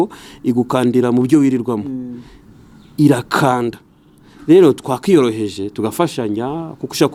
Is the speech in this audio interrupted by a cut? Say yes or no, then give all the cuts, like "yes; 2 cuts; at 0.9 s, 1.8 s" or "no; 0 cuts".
no; 0 cuts